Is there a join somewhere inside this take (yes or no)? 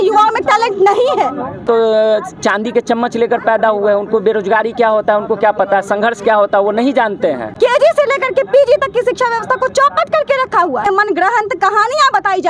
yes